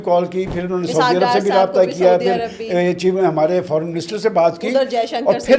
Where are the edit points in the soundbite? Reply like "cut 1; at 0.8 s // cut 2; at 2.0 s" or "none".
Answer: none

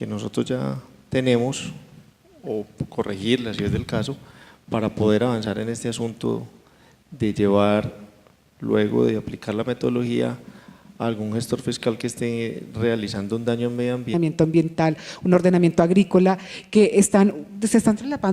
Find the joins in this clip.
none

